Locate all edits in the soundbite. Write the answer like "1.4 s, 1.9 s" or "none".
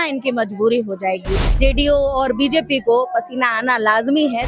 1.4 s